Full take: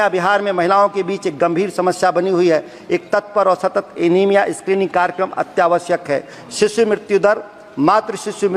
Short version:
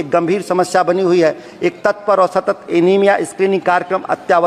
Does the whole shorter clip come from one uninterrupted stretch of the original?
yes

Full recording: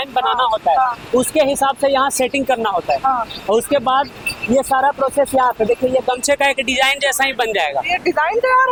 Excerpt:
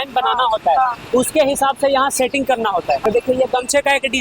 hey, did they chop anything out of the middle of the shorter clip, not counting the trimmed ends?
yes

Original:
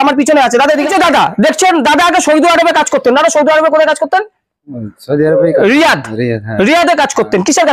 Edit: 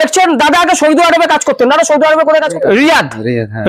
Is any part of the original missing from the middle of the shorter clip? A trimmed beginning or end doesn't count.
yes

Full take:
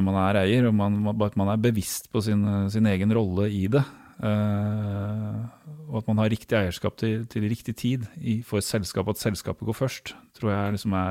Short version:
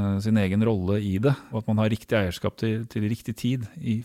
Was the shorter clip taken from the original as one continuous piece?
no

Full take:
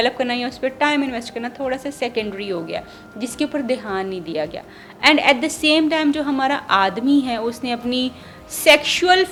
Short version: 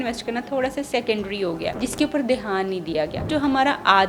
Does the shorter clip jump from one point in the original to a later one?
yes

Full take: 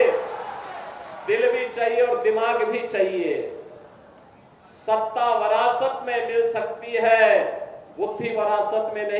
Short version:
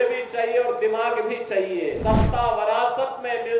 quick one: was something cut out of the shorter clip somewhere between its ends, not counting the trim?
yes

